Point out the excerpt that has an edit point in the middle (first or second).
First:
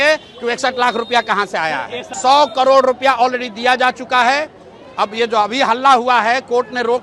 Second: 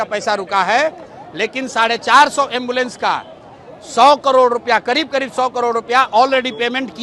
first